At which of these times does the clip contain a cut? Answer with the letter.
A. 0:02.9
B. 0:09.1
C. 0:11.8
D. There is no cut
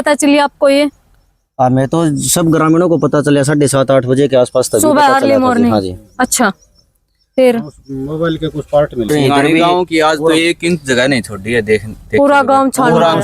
B